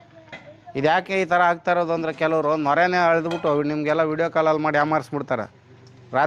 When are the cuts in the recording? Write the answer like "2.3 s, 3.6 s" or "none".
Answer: none